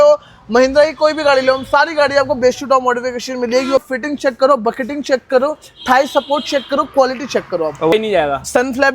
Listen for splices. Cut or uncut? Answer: cut